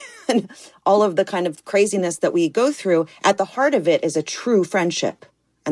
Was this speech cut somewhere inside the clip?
no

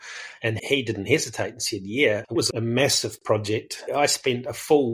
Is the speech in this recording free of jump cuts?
no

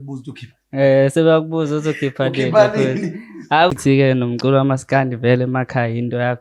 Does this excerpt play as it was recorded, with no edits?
no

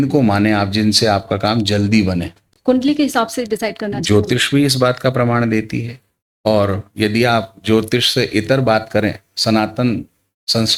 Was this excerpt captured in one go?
yes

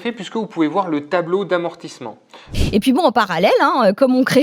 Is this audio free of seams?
no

